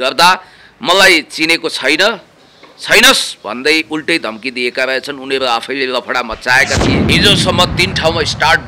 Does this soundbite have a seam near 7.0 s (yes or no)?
yes